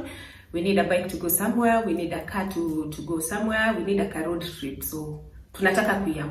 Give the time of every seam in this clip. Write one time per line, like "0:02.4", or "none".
none